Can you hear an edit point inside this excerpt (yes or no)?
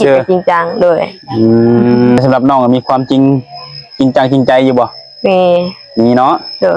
yes